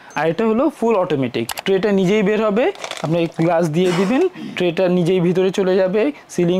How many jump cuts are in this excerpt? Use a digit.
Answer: 1